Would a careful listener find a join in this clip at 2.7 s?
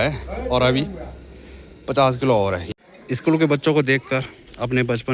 yes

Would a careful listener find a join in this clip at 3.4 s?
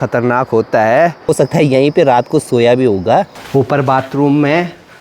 yes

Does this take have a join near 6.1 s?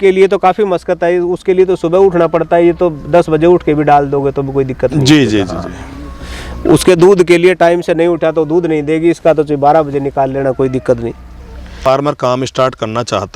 no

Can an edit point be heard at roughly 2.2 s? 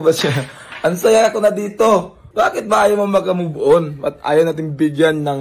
yes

